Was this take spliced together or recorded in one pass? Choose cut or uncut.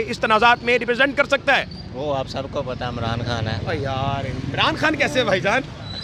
uncut